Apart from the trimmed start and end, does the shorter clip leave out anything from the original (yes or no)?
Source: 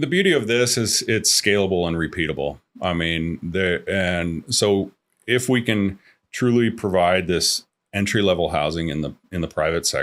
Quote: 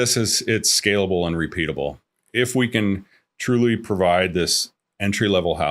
yes